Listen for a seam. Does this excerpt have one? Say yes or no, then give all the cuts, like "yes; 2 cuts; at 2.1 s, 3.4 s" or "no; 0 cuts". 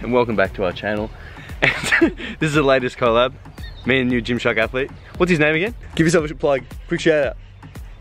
no; 0 cuts